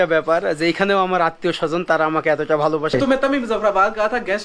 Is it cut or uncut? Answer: cut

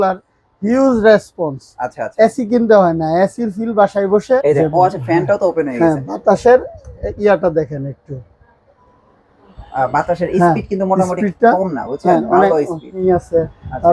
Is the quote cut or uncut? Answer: cut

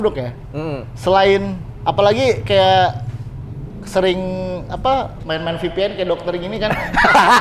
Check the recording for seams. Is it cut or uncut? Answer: uncut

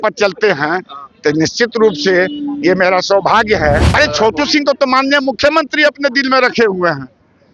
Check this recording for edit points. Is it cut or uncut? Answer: cut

